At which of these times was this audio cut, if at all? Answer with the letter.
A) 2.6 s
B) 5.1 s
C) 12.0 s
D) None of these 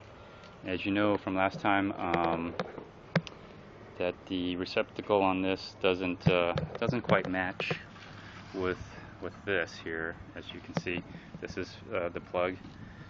C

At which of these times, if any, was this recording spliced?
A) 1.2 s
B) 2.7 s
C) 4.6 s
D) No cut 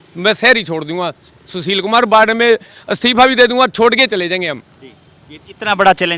D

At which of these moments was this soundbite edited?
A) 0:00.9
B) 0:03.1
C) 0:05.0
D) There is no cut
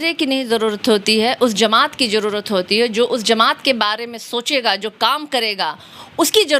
D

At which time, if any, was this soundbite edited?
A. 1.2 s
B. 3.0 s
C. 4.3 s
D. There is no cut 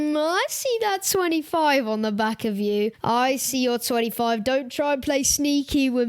B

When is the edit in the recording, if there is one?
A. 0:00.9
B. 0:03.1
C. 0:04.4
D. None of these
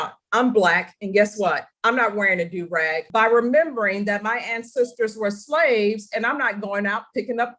B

